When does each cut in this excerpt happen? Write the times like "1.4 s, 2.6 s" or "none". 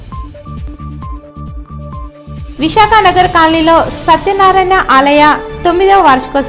1.9 s